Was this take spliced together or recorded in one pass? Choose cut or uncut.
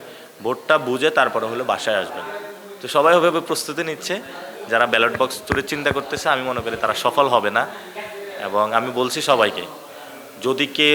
uncut